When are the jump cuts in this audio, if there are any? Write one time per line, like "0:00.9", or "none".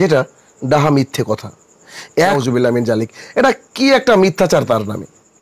0:02.4